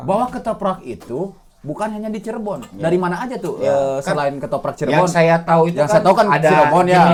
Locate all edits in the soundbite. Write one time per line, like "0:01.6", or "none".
none